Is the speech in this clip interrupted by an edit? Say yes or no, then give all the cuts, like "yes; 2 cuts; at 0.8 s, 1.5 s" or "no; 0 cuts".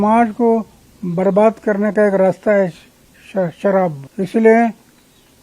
yes; 1 cut; at 4.0 s